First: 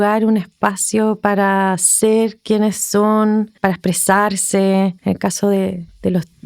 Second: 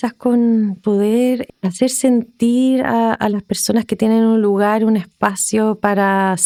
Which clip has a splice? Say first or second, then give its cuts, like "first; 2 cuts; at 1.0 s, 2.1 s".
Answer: first; 2 cuts; at 3.5 s, 5.0 s